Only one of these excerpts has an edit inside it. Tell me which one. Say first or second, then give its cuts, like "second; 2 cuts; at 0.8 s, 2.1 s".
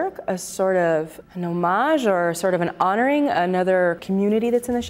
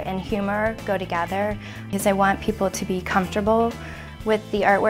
first; 2 cuts; at 1.2 s, 4.0 s